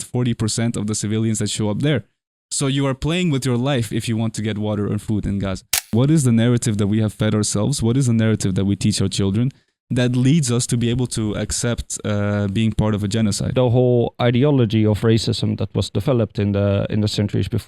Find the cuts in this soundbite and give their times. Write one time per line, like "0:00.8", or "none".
0:05.9
0:13.5